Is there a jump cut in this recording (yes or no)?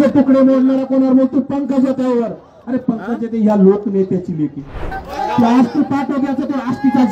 yes